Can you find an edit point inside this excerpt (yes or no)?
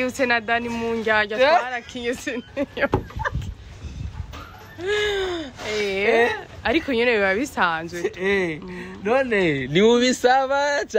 no